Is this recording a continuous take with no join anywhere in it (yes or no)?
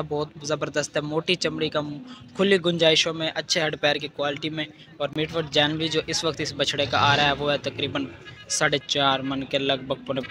yes